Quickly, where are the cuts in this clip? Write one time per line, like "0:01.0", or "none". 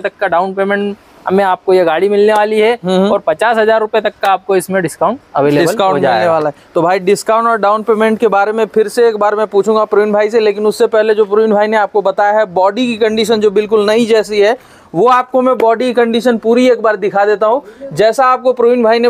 none